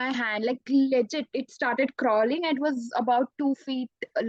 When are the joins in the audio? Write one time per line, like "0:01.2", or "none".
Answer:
none